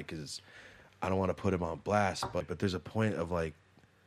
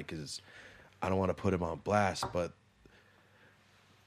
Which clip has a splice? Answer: first; 1 cut; at 2.4 s

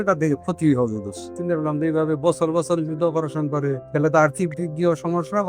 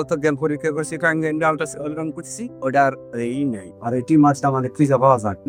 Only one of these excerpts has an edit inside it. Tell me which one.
first; 2 cuts; at 1.3 s, 3.8 s

